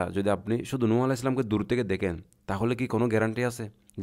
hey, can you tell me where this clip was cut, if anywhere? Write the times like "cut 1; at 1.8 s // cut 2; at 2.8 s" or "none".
none